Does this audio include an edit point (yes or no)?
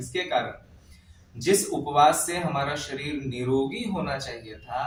no